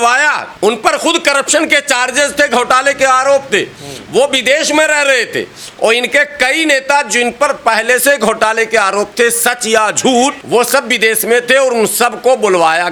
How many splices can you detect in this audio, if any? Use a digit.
0